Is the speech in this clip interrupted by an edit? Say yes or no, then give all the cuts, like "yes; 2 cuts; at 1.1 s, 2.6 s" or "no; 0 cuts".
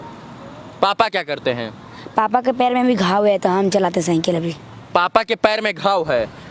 no; 0 cuts